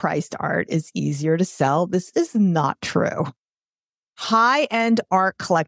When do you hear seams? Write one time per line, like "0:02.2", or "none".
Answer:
0:04.1